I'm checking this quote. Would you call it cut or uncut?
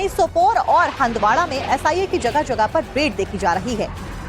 cut